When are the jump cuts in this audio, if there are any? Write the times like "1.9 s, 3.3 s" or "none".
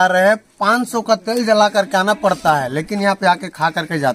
none